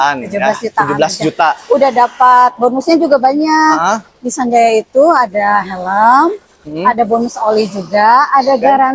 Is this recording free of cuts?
yes; 0 cuts

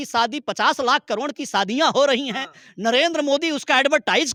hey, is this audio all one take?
yes; 0 cuts

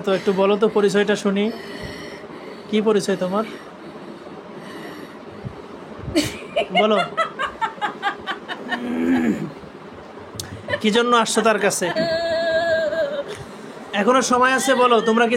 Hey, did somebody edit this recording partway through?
yes; 1 cut; at 11.9 s

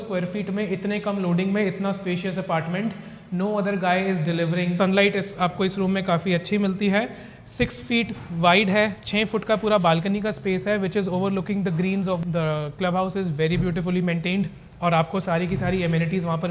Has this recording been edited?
yes; 2 cuts; at 4.8 s, 12.2 s

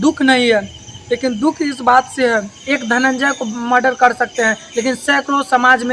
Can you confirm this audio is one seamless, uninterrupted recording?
no; 1 cut; at 2.6 s

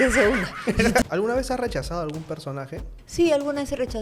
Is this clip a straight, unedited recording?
no; 2 cuts; at 1.0 s, 3.0 s

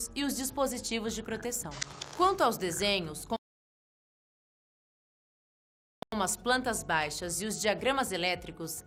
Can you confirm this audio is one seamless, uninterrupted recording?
yes; 0 cuts

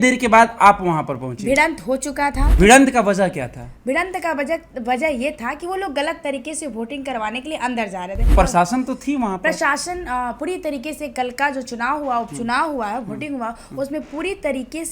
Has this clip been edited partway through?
yes; 2 cuts; at 2.5 s, 8.3 s

